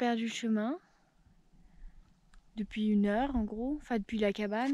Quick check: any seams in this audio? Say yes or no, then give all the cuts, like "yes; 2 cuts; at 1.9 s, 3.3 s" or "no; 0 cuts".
no; 0 cuts